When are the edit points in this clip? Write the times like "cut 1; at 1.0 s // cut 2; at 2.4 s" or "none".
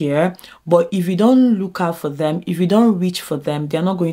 none

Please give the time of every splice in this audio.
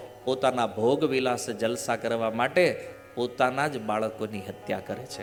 none

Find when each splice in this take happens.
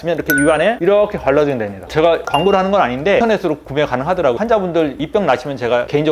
cut 1; at 3.2 s

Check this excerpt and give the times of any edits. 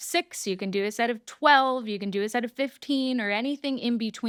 none

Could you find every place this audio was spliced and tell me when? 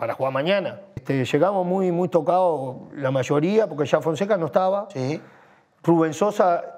cut 1; at 0.9 s

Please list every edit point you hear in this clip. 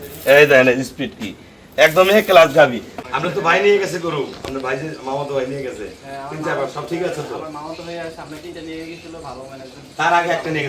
cut 1; at 2.9 s

